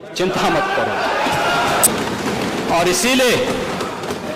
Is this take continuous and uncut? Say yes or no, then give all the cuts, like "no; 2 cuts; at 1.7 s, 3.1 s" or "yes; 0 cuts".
no; 1 cut; at 1.9 s